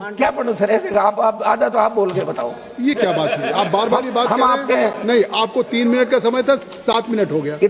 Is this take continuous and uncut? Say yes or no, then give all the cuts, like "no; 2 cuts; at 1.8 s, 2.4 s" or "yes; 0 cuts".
yes; 0 cuts